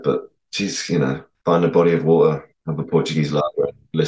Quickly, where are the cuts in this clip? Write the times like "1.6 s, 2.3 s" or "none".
1.3 s, 2.6 s